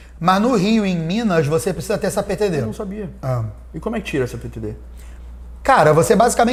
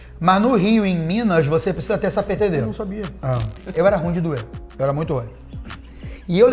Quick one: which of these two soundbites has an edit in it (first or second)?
second